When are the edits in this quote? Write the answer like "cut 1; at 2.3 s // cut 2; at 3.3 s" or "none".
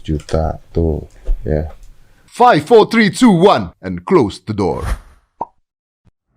cut 1; at 2.2 s